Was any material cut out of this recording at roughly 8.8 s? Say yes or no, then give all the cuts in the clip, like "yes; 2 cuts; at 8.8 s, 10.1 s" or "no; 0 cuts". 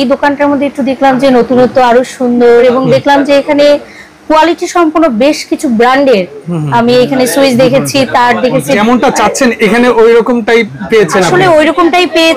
yes; 2 cuts; at 2.6 s, 8.8 s